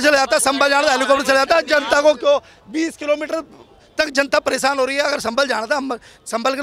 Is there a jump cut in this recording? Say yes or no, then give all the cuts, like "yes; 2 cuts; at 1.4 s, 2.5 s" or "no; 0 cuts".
no; 0 cuts